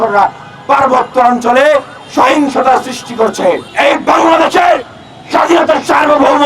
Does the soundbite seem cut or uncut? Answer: cut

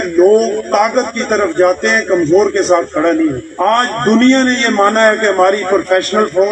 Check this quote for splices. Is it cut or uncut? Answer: uncut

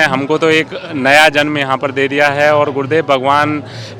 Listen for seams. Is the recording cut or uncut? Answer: uncut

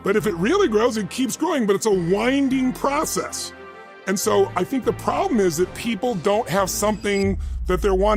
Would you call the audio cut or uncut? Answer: uncut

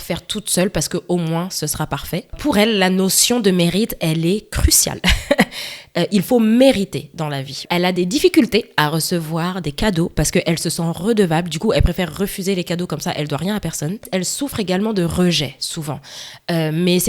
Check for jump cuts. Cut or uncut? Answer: cut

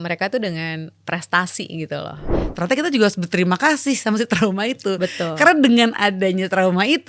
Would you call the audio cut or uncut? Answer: cut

